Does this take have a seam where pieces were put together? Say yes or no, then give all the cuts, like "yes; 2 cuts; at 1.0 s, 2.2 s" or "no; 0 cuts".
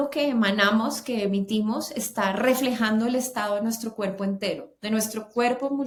no; 0 cuts